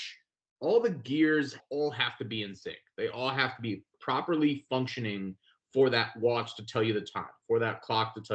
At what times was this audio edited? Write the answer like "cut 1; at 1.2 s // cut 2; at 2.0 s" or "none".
cut 1; at 1.6 s // cut 2; at 3.9 s